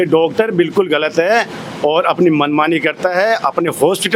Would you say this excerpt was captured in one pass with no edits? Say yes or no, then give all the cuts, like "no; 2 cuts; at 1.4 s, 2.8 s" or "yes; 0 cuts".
yes; 0 cuts